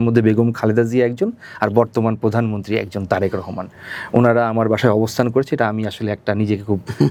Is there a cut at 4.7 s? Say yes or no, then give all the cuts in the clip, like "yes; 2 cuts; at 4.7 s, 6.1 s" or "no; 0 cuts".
no; 0 cuts